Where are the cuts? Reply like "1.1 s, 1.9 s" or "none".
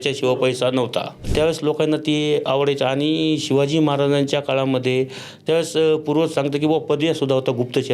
1.2 s